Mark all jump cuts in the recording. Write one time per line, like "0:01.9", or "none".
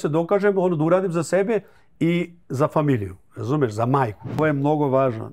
0:04.4